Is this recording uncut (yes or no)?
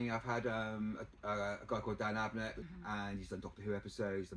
no